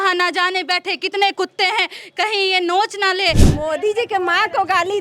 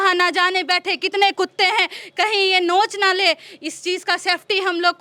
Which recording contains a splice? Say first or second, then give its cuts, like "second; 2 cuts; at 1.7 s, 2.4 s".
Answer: first; 1 cut; at 3.5 s